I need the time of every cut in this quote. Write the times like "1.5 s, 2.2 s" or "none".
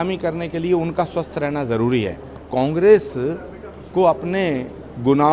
2.5 s

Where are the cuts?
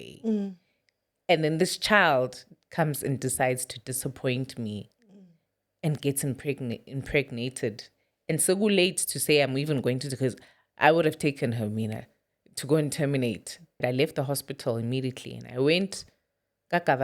13.8 s

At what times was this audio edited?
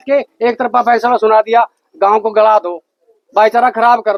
none

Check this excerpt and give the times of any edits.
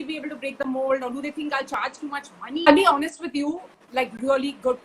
2.7 s

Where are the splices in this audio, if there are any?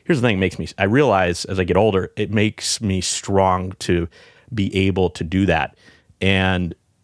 none

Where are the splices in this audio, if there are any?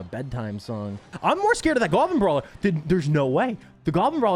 1.1 s

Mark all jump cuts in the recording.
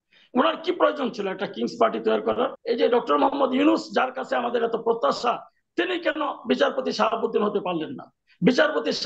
2.6 s

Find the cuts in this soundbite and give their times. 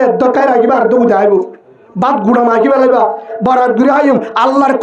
3.3 s

